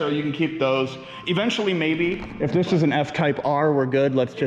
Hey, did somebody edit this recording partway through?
yes; 1 cut; at 2.3 s

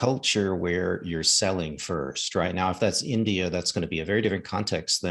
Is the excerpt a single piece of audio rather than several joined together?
yes; 0 cuts

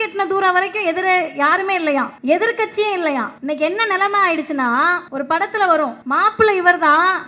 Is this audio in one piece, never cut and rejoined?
no; 4 cuts; at 2.1 s, 3.3 s, 5.1 s, 6.0 s

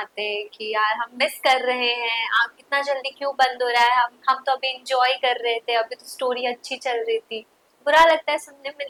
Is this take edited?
no; 0 cuts

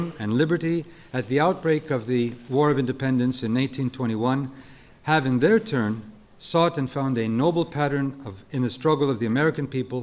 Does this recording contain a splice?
yes; 1 cut; at 8.9 s

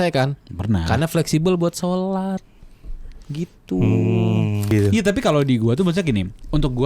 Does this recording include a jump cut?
yes; 1 cut; at 4.7 s

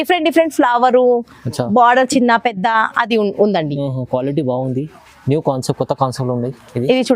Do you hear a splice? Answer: no; 0 cuts

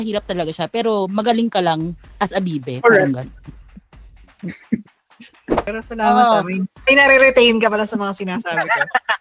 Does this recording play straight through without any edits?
no; 1 cut; at 5.7 s

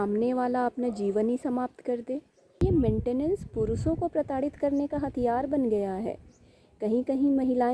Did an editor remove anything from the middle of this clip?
yes; 1 cut; at 2.6 s

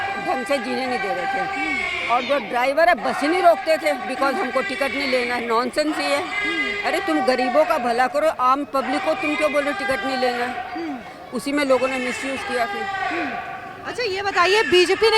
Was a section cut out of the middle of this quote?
no; 0 cuts

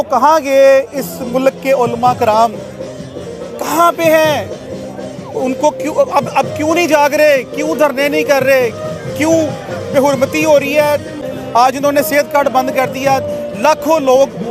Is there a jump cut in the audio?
yes; 1 cut; at 11.2 s

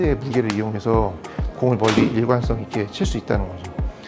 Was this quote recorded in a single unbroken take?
yes; 0 cuts

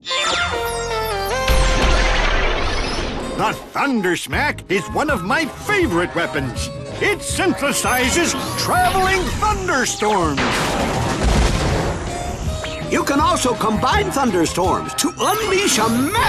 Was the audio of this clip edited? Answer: no; 0 cuts

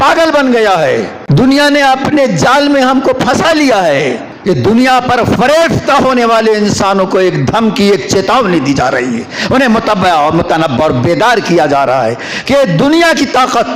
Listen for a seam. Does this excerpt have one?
yes; 2 cuts; at 1.2 s, 4.3 s

